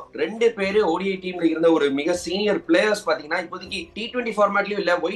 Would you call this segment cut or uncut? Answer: cut